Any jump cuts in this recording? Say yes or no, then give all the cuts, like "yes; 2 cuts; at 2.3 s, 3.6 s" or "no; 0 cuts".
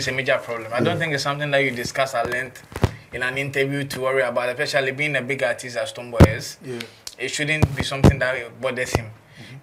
no; 0 cuts